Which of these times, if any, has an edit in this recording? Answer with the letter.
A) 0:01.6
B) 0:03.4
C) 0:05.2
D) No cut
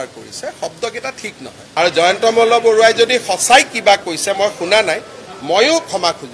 A